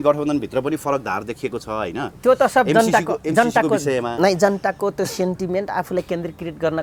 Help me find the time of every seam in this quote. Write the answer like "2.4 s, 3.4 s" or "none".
none